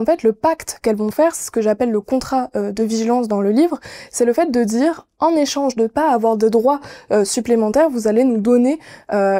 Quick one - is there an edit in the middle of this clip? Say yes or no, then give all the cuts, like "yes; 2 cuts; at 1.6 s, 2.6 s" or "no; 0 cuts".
no; 0 cuts